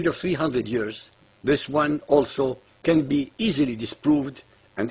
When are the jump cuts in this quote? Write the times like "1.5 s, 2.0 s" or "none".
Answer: none